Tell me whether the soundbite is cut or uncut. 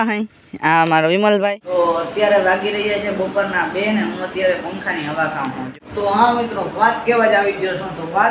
cut